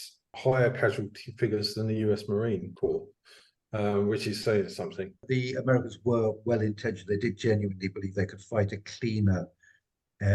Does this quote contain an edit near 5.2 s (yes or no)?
yes